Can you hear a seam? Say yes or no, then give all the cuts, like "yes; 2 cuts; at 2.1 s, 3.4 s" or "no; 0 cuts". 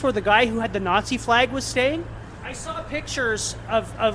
yes; 1 cut; at 2.3 s